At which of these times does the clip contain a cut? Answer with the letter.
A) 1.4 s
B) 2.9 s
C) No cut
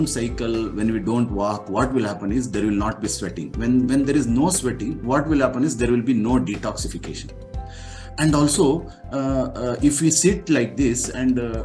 C